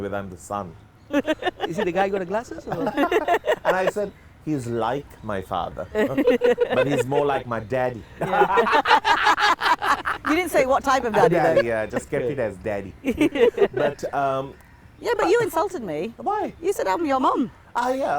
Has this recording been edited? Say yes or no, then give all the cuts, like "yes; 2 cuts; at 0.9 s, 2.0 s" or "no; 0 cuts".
no; 0 cuts